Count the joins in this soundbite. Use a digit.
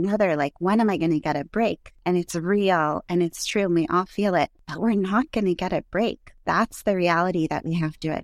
3